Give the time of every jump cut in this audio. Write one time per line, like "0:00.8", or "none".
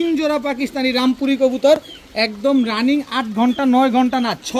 none